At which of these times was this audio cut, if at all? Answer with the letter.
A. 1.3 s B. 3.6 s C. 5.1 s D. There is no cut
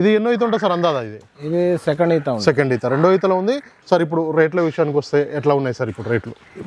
B